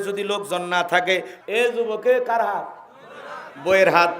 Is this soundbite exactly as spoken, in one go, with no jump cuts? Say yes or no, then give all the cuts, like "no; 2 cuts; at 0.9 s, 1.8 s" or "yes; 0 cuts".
no; 1 cut; at 1.3 s